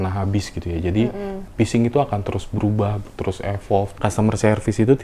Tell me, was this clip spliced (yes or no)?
yes